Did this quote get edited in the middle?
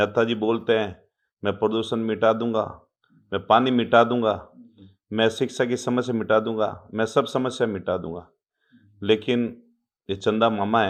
no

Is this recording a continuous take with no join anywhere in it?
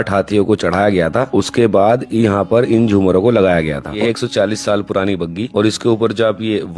no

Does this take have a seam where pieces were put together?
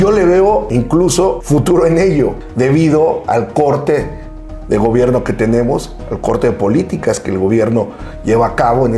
yes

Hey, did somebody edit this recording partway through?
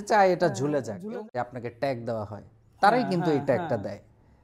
yes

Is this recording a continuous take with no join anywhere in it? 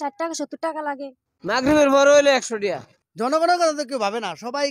no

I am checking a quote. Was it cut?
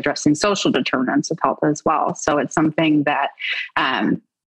no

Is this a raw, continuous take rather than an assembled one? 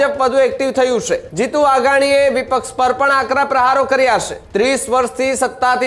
no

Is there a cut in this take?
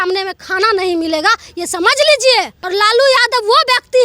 yes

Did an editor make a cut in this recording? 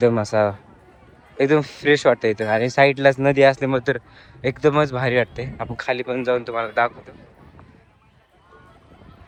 no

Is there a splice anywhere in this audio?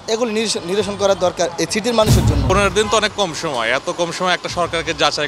yes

